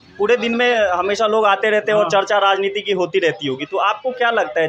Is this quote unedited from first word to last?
yes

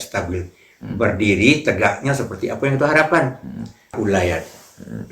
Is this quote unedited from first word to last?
no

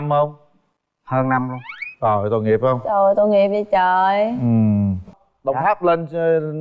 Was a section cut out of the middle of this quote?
yes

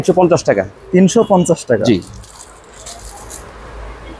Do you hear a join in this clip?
no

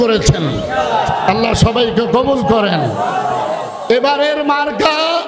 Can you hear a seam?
no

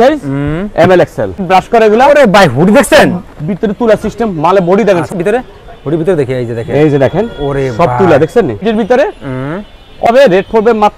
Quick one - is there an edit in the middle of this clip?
yes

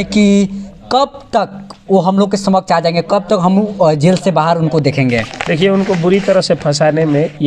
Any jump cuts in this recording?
no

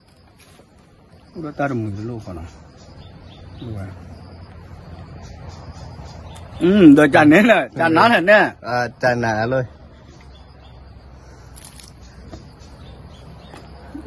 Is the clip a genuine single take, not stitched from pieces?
yes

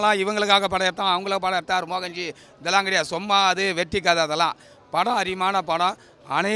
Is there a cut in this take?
no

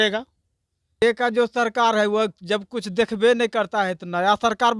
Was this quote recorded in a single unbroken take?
no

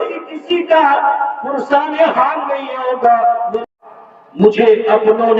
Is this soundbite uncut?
no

